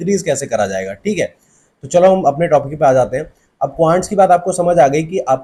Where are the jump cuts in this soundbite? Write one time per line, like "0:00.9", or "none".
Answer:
none